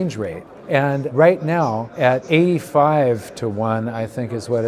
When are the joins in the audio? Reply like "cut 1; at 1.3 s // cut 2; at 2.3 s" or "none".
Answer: cut 1; at 1.1 s // cut 2; at 2.1 s